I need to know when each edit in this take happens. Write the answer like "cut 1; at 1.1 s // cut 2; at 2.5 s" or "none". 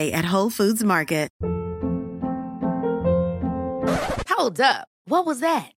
cut 1; at 1.3 s